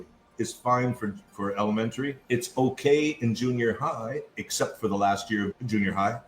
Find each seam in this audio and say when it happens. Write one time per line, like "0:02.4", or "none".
0:02.2